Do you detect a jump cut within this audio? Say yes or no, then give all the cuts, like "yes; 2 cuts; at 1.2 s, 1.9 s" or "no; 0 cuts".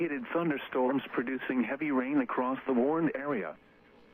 no; 0 cuts